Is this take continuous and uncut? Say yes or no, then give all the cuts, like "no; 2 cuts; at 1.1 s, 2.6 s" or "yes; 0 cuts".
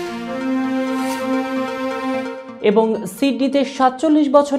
no; 1 cut; at 2.4 s